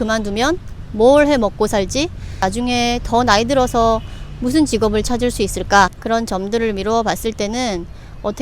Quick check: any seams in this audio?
yes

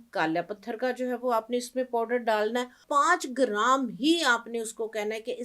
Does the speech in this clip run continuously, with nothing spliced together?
no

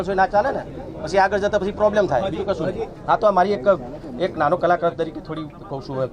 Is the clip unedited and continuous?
yes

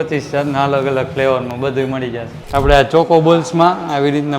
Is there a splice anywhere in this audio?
yes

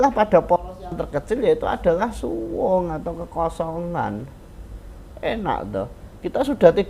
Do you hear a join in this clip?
no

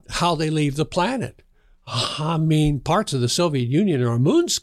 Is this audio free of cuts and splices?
yes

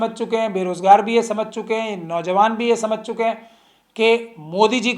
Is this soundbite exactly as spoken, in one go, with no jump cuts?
yes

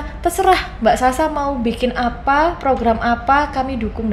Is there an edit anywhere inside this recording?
no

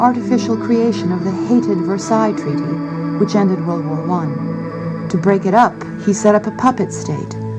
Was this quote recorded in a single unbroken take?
no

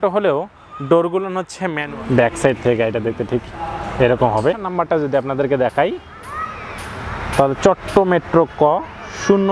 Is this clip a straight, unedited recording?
no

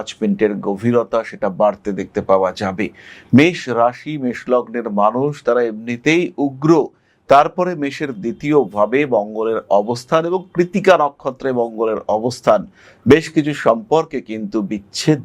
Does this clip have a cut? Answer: no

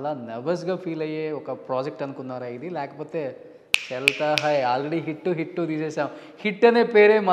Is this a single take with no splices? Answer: yes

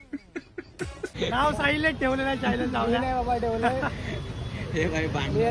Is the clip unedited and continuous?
no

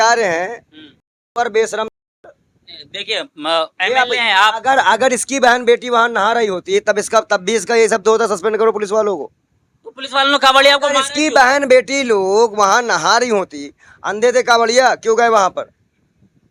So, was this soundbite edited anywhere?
no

